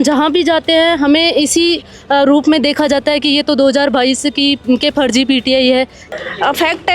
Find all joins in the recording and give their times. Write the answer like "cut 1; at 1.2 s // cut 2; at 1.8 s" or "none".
cut 1; at 6.0 s